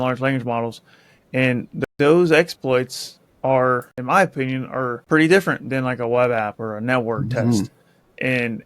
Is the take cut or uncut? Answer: cut